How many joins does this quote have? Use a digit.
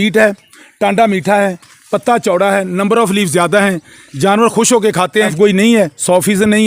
1